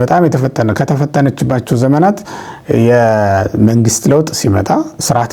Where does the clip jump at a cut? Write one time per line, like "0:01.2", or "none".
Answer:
none